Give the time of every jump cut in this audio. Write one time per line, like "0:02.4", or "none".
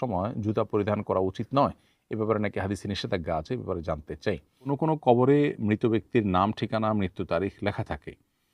0:04.5